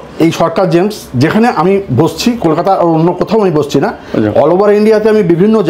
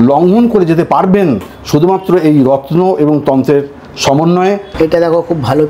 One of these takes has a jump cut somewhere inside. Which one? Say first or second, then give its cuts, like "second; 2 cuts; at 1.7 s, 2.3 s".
second; 1 cut; at 4.7 s